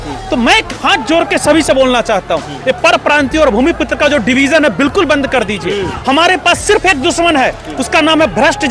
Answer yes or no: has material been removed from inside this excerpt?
no